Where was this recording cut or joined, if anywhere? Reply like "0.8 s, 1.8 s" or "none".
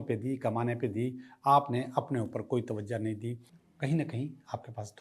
3.5 s